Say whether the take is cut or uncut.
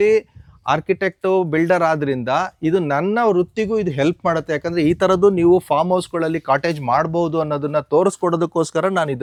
uncut